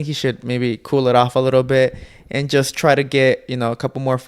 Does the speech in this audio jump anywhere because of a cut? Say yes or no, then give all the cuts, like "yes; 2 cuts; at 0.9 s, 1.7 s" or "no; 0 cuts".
no; 0 cuts